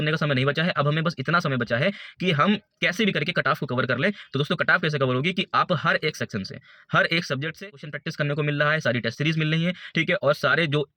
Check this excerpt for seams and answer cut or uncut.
cut